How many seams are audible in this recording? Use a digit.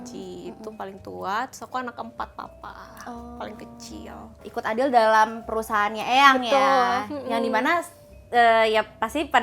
1